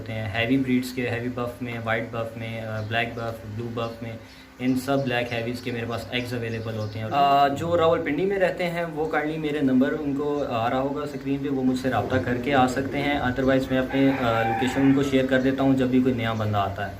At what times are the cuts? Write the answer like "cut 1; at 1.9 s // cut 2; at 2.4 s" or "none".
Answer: cut 1; at 7.1 s